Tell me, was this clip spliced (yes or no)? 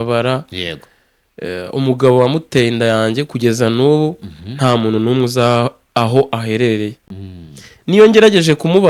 no